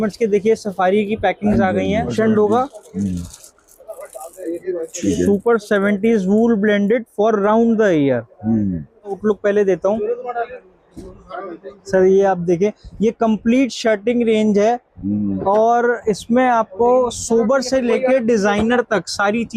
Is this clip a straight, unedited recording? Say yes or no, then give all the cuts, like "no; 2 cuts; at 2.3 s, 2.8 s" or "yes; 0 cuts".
no; 2 cuts; at 2.1 s, 9.2 s